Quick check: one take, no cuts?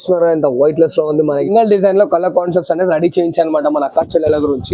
no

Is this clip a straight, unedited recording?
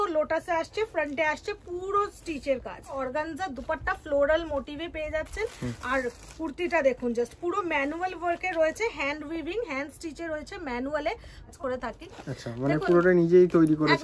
no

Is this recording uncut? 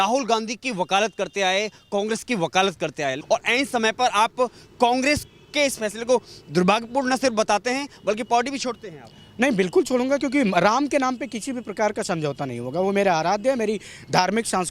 no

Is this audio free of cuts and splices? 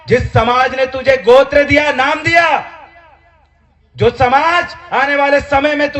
yes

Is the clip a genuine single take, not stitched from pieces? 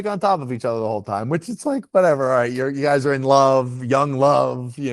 yes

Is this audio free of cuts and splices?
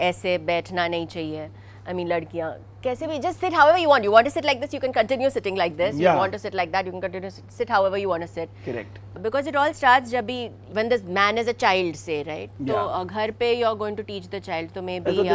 yes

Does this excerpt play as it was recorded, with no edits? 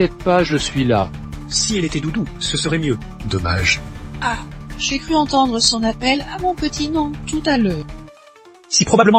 yes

